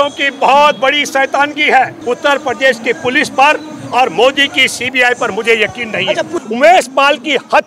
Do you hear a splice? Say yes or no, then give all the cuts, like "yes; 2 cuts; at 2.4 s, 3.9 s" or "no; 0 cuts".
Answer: yes; 2 cuts; at 2.0 s, 6.4 s